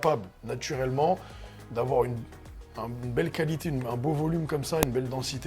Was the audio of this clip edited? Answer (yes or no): no